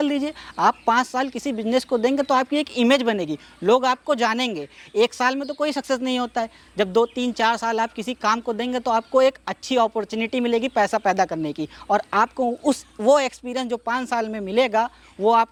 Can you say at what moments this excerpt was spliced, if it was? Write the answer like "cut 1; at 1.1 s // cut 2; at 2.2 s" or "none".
none